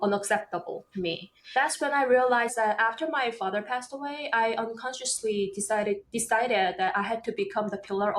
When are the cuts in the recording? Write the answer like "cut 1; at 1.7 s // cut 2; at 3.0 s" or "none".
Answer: cut 1; at 1.5 s // cut 2; at 2.5 s

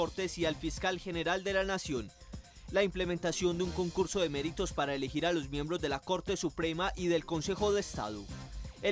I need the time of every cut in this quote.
none

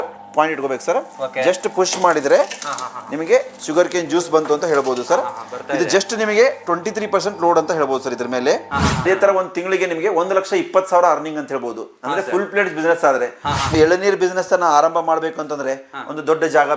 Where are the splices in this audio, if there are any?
cut 1; at 9.0 s // cut 2; at 13.7 s

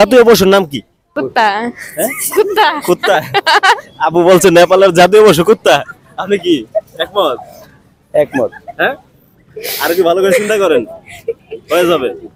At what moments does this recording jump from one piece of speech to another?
cut 1; at 0.9 s

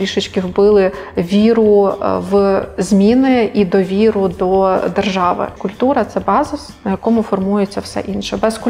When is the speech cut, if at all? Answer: cut 1; at 5.6 s

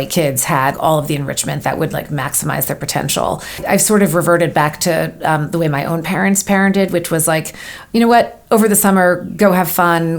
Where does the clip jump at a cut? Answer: cut 1; at 3.6 s

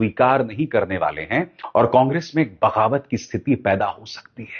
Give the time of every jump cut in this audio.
none

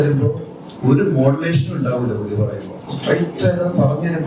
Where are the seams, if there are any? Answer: cut 1; at 2.8 s

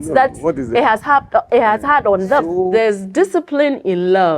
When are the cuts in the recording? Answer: cut 1; at 2.6 s

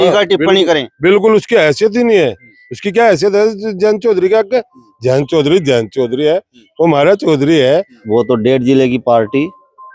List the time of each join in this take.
cut 1; at 8.0 s

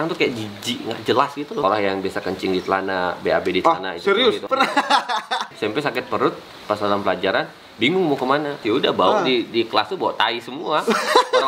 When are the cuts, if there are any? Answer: cut 1; at 1.6 s // cut 2; at 4.4 s // cut 3; at 5.5 s // cut 4; at 8.6 s

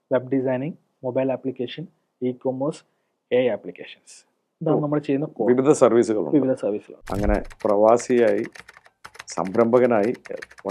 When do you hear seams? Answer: cut 1; at 6.9 s

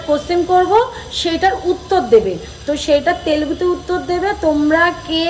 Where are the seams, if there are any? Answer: none

